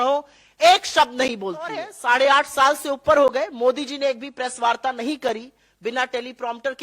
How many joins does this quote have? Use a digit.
1